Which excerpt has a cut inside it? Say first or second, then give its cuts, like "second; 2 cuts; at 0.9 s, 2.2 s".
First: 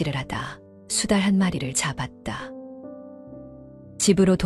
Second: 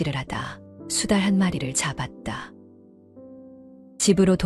first; 2 cuts; at 2.4 s, 3.5 s